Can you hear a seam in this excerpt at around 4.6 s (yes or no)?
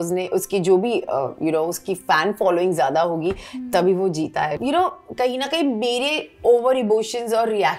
yes